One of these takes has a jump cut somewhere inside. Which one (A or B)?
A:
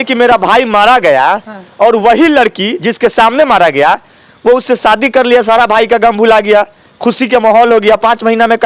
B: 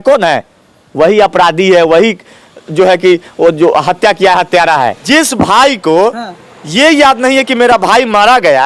B